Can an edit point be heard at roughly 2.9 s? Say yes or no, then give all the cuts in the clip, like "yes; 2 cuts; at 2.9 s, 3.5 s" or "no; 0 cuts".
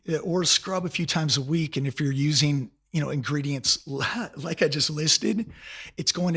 no; 0 cuts